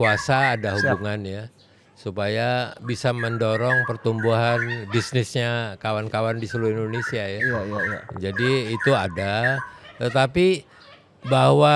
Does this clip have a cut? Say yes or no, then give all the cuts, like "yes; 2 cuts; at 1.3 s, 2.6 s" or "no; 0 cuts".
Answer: no; 0 cuts